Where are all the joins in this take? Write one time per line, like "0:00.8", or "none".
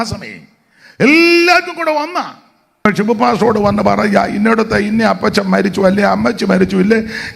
0:02.9

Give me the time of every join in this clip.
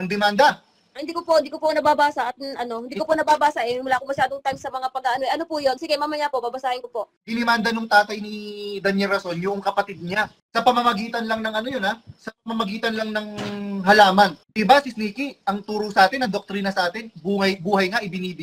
0:07.2
0:10.4
0:14.4

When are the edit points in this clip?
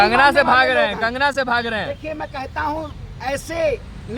none

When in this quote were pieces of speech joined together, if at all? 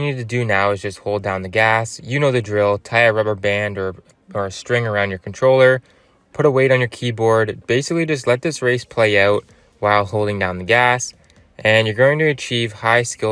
none

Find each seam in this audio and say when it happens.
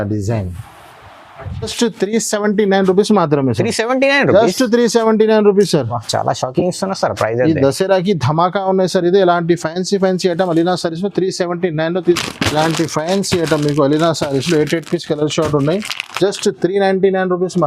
0:01.7
0:12.2

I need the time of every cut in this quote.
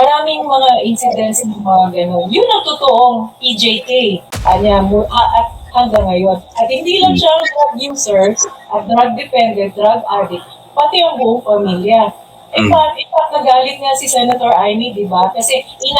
0:04.3

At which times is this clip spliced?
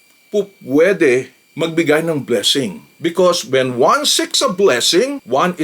0:02.8

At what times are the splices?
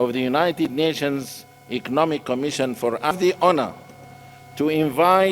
0:03.1

